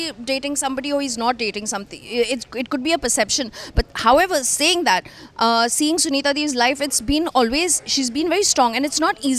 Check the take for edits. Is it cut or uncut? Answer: uncut